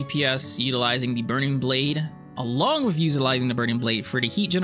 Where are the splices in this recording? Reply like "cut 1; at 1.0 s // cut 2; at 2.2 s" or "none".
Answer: none